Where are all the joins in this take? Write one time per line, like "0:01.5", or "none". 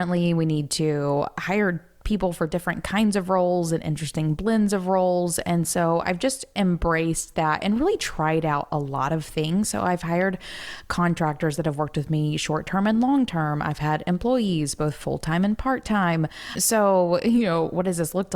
0:16.6